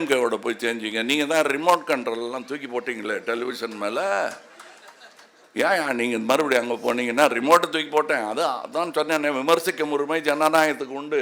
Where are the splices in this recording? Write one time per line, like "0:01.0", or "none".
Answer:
none